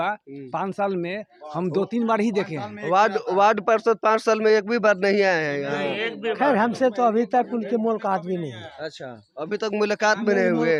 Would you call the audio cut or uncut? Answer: uncut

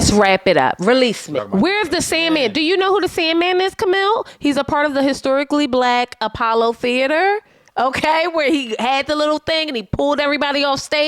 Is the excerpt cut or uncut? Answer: cut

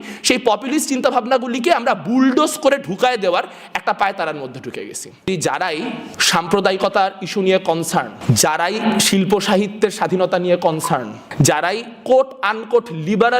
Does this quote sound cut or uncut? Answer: cut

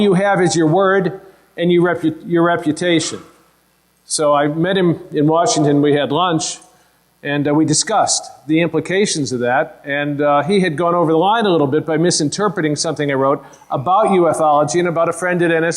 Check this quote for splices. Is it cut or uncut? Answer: cut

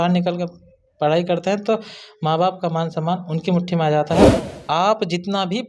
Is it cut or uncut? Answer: cut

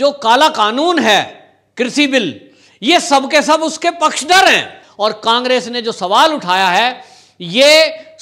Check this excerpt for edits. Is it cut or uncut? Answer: cut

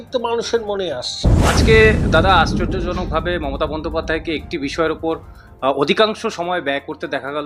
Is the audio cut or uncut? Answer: cut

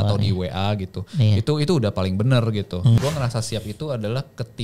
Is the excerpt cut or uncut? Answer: cut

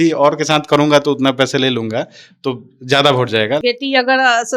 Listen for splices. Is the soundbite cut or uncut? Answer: cut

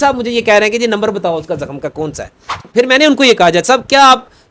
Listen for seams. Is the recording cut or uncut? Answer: cut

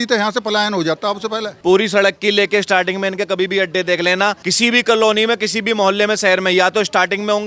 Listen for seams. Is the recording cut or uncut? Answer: cut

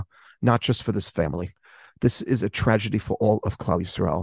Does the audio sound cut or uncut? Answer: uncut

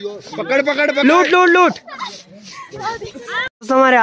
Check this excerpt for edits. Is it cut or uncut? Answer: uncut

